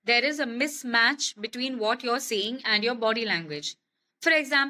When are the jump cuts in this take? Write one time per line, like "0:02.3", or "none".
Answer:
none

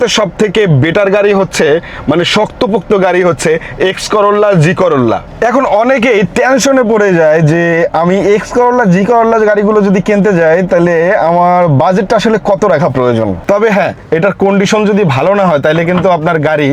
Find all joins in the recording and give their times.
0:05.3
0:13.4

